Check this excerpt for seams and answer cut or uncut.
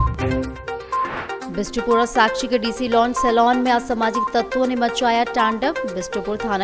cut